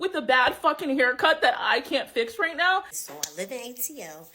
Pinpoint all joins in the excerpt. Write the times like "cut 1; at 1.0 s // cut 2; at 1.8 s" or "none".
cut 1; at 2.9 s